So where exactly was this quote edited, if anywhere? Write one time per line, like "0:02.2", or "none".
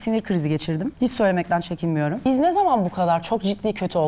0:00.9
0:02.2